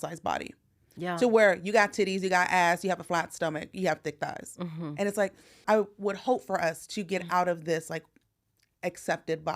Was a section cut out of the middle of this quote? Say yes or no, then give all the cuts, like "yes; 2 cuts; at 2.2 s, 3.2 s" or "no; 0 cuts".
yes; 1 cut; at 5.6 s